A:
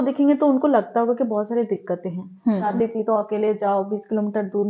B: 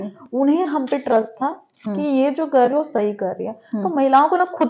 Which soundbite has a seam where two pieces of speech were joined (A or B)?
A